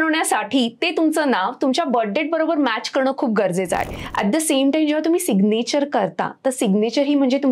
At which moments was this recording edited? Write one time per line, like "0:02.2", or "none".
0:04.0